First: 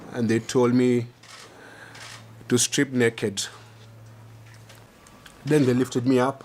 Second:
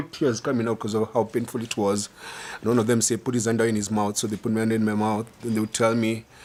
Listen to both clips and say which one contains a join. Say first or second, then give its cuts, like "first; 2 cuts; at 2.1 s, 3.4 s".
first; 1 cut; at 4.7 s